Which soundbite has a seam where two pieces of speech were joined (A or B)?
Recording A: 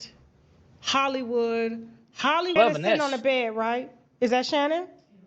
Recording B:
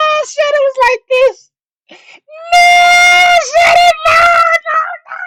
A